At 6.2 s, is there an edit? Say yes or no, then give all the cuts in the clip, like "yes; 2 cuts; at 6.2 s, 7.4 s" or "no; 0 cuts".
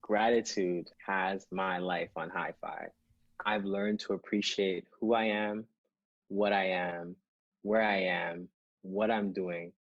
no; 1 cut; at 0.9 s